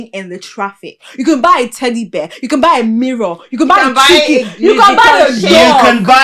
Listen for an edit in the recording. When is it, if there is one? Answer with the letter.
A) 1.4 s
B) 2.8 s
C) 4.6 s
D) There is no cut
D